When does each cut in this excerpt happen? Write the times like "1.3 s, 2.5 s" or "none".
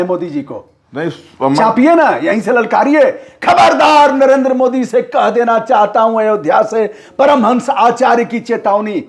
none